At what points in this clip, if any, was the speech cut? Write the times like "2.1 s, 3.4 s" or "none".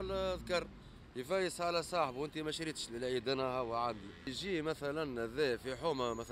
4.4 s